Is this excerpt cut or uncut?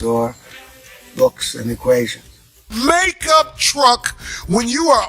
cut